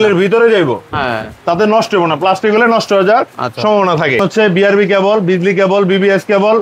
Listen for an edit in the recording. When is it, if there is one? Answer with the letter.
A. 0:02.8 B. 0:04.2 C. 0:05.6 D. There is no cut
B